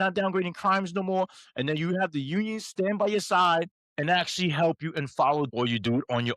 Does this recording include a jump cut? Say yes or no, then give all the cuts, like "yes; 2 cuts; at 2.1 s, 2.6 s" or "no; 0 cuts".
yes; 2 cuts; at 3.8 s, 5.5 s